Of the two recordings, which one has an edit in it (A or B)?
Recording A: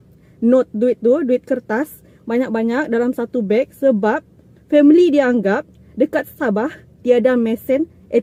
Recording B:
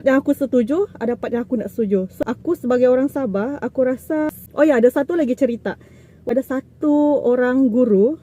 B